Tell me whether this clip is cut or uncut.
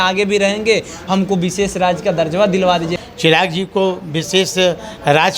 cut